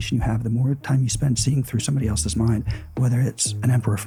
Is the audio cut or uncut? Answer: uncut